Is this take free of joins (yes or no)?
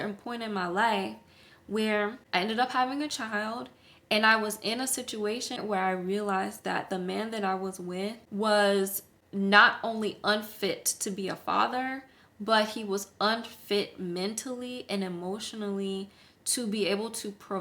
no